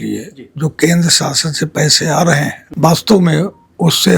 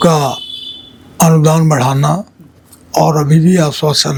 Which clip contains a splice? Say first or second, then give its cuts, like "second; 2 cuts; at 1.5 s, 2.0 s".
first; 1 cut; at 2.6 s